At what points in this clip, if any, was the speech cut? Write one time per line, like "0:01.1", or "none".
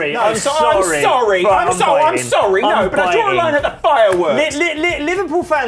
none